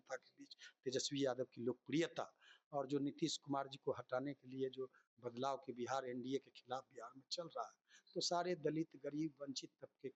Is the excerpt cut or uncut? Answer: uncut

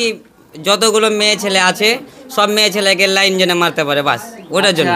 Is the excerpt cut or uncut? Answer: uncut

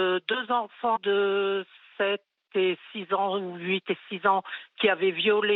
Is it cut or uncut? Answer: uncut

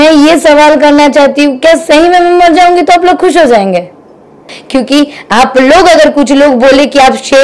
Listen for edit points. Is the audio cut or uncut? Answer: cut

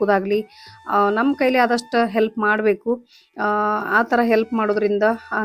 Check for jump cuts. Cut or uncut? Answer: uncut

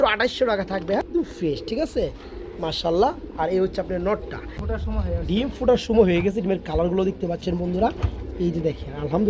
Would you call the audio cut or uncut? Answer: cut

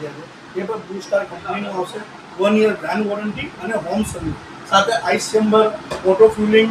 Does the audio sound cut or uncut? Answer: uncut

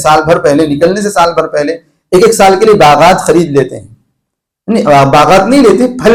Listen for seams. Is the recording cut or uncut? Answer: uncut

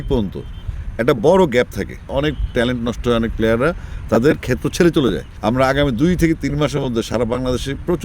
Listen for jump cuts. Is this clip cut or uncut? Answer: cut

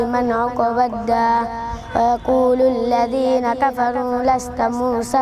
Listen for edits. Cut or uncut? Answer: uncut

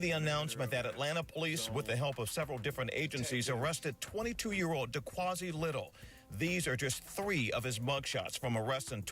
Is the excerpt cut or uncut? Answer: cut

